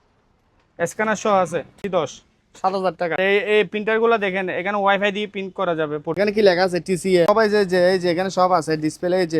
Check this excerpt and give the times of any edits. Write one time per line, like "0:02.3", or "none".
0:01.8
0:03.2
0:06.1
0:07.3